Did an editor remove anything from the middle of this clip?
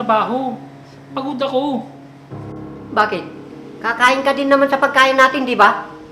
no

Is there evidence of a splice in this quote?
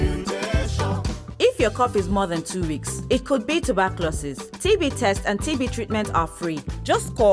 yes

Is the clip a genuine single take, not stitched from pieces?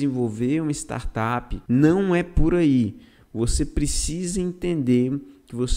no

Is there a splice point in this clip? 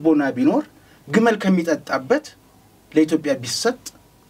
no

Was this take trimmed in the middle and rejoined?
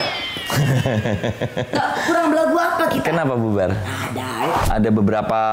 yes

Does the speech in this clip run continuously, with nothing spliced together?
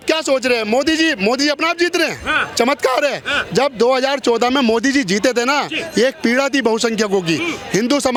yes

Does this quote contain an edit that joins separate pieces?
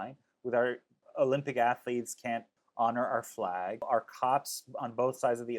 yes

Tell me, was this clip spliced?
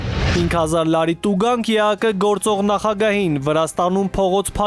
no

